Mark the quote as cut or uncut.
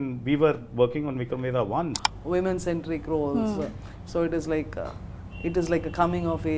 cut